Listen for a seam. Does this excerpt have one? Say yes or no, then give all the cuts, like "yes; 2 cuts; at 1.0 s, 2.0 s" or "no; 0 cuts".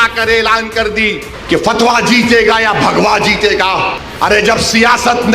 yes; 2 cuts; at 1.3 s, 4.0 s